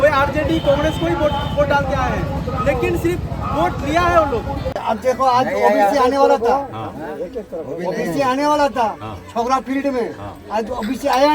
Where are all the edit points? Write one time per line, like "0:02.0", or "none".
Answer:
0:04.8